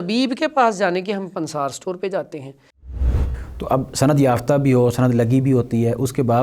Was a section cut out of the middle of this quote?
yes; 1 cut; at 2.9 s

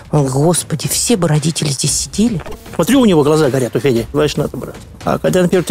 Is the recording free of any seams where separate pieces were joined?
no; 2 cuts; at 2.6 s, 4.1 s

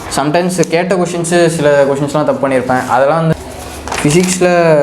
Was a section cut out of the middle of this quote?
yes; 1 cut; at 3.3 s

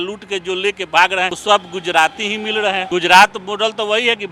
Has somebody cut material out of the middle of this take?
yes; 2 cuts; at 1.4 s, 2.8 s

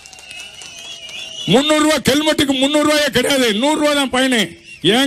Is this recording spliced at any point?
no; 0 cuts

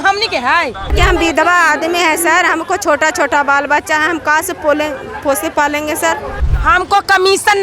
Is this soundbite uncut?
no; 2 cuts; at 0.9 s, 6.4 s

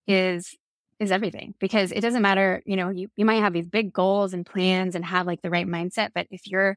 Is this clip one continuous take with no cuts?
yes; 0 cuts

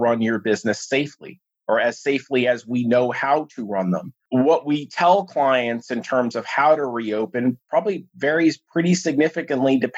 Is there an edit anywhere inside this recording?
yes; 1 cut; at 4.1 s

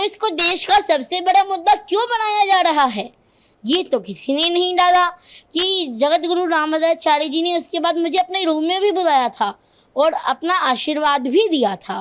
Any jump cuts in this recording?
no; 0 cuts

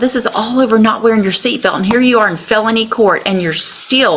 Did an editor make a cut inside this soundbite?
no; 0 cuts

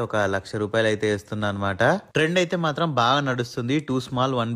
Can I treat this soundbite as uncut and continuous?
yes; 0 cuts

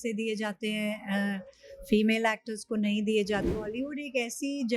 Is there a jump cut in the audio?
yes; 1 cut; at 3.5 s

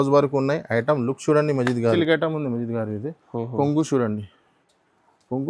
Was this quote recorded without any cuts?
no; 1 cut; at 2.0 s

